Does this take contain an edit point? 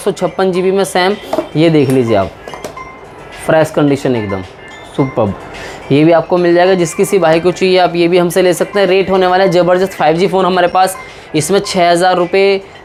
no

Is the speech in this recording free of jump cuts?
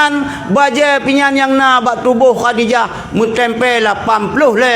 yes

